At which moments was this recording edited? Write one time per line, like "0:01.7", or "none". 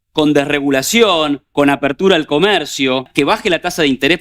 0:03.1